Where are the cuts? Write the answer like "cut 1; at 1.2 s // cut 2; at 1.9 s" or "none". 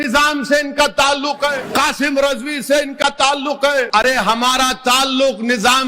cut 1; at 1.6 s // cut 2; at 3.9 s

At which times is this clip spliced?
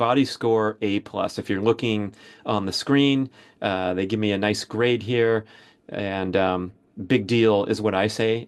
none

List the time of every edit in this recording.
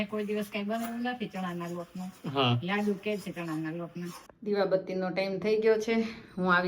cut 1; at 4.2 s

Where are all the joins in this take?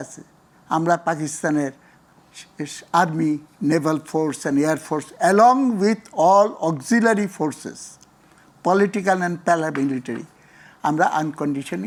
none

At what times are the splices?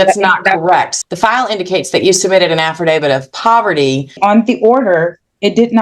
cut 1; at 0.9 s // cut 2; at 4.2 s

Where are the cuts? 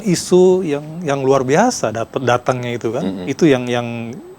cut 1; at 3.2 s

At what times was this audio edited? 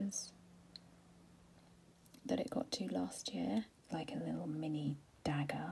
cut 1; at 3.8 s

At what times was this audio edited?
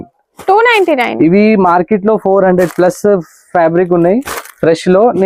none

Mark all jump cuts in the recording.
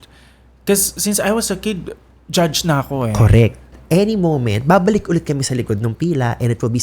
cut 1; at 3.8 s

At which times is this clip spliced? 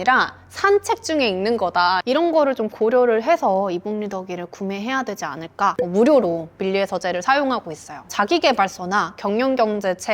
cut 1; at 2.0 s // cut 2; at 5.8 s // cut 3; at 8.0 s

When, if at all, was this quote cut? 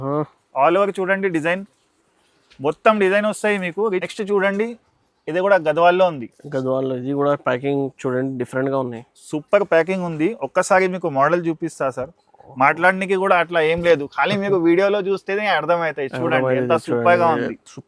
cut 1; at 4.1 s

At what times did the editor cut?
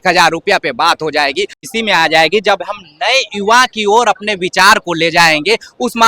cut 1; at 1.6 s

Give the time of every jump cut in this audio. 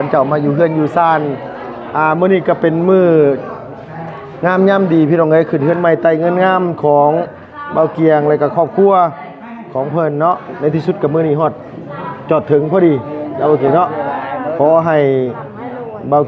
none

